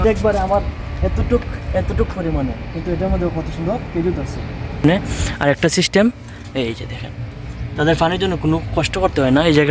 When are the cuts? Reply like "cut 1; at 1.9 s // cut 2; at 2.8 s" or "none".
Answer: cut 1; at 4.8 s